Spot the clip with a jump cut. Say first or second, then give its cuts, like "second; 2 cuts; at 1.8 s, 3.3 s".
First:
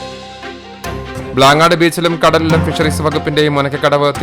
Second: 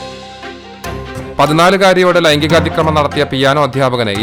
first; 1 cut; at 1.3 s